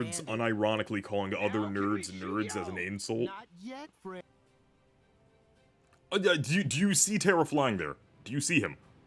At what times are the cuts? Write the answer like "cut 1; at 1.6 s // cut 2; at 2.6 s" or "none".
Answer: cut 1; at 4.2 s